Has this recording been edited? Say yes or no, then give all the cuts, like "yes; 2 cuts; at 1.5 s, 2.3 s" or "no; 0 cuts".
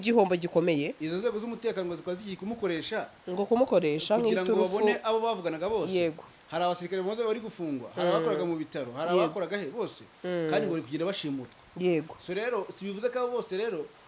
yes; 1 cut; at 1.0 s